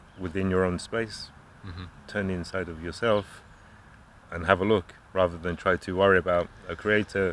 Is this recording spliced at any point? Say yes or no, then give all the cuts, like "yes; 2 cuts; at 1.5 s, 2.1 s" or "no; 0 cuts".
no; 0 cuts